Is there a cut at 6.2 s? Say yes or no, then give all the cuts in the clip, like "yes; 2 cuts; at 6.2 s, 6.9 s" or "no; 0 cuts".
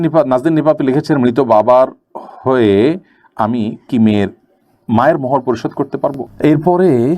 yes; 1 cut; at 6.2 s